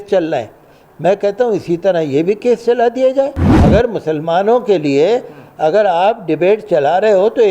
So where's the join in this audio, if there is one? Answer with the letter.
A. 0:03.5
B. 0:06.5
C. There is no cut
A